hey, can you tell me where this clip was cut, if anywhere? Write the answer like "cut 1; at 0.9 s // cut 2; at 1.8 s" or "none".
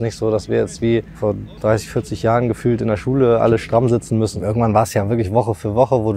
cut 1; at 1.1 s // cut 2; at 4.3 s